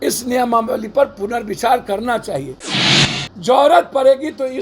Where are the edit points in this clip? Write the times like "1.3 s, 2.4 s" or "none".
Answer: 3.0 s